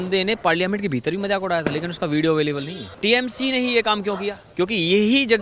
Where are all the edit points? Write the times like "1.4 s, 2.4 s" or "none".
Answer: 2.8 s